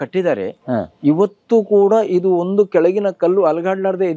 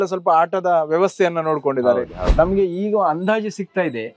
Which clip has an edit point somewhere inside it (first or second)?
second